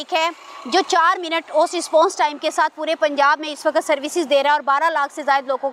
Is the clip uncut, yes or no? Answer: yes